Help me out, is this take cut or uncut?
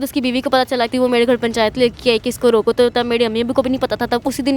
cut